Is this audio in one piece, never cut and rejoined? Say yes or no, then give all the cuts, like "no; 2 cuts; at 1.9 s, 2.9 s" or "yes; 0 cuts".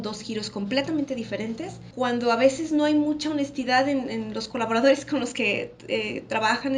no; 1 cut; at 1.8 s